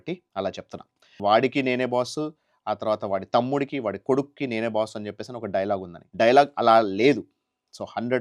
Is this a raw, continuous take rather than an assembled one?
no; 2 cuts; at 1.1 s, 6.0 s

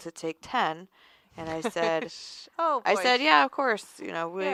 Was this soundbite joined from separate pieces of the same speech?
no; 0 cuts

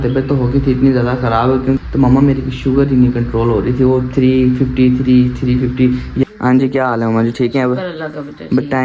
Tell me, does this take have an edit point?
yes; 2 cuts; at 1.8 s, 6.3 s

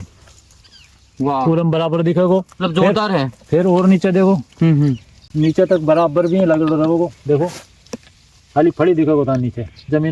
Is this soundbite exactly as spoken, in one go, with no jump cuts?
yes; 0 cuts

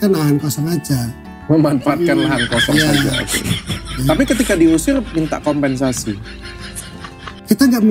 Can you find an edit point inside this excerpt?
no; 0 cuts

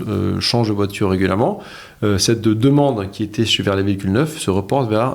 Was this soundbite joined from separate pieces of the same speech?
no; 0 cuts

